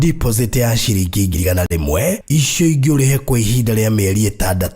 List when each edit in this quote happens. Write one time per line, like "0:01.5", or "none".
0:01.5